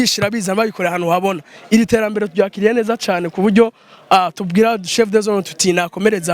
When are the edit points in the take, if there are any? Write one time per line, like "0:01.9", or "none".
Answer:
none